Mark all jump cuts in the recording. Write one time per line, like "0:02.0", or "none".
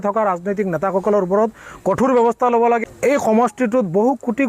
0:02.8